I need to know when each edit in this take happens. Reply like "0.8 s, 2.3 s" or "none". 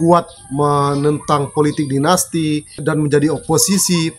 2.7 s